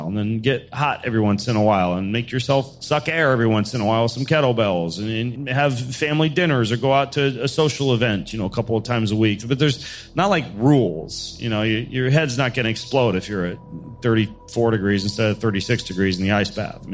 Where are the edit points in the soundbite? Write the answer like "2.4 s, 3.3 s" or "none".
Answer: 2.8 s, 5.3 s